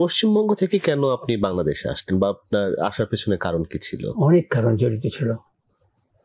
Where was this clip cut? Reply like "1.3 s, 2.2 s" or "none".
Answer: none